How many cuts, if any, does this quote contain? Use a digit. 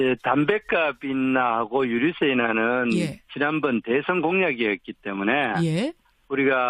1